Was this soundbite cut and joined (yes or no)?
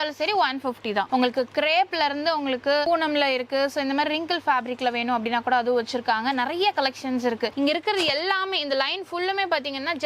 yes